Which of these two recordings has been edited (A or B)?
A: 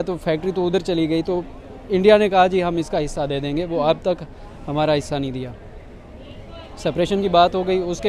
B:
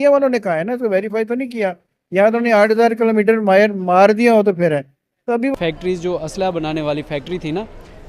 B